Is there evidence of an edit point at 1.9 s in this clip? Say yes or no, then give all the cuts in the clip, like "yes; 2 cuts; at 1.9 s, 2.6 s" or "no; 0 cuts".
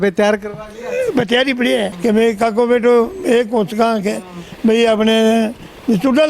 yes; 1 cut; at 1.9 s